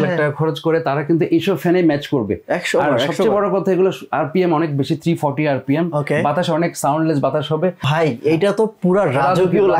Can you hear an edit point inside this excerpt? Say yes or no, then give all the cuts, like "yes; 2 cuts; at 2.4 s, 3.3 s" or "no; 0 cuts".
yes; 1 cut; at 7.8 s